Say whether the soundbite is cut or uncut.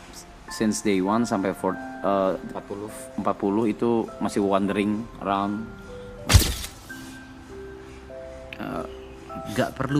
cut